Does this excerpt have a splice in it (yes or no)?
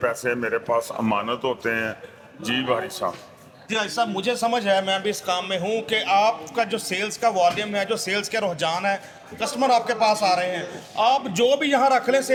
no